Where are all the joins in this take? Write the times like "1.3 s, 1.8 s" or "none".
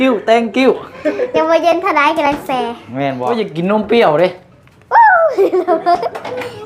3.2 s